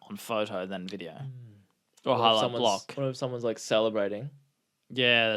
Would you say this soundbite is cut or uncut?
uncut